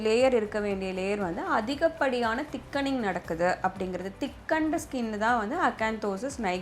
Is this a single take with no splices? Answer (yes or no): yes